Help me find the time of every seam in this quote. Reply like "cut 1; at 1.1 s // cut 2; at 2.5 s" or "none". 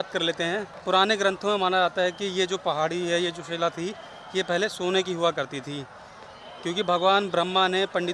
none

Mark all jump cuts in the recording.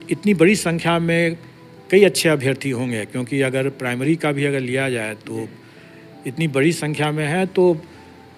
none

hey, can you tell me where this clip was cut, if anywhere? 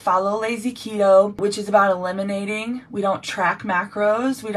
cut 1; at 1.4 s

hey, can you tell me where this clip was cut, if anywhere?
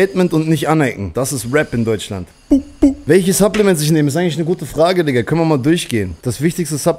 cut 1; at 1.0 s // cut 2; at 2.4 s // cut 3; at 6.1 s

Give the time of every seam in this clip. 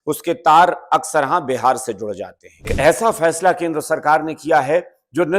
cut 1; at 2.7 s

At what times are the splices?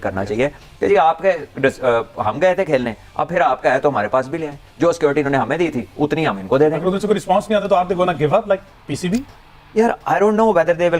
none

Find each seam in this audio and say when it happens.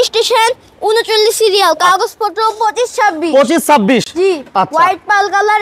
none

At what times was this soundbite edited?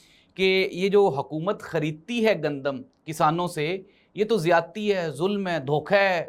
none

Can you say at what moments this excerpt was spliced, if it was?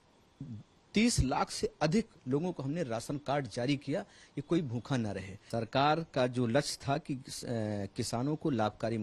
cut 1; at 5.4 s

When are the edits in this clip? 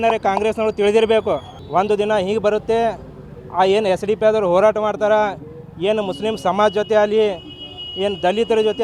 none

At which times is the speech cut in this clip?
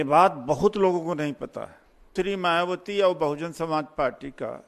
cut 1; at 2.1 s

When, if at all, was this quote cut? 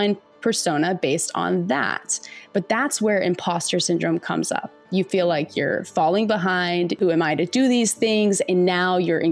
cut 1; at 7.0 s

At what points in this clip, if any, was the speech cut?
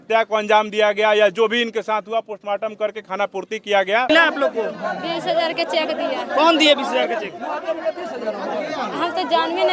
cut 1; at 4.1 s

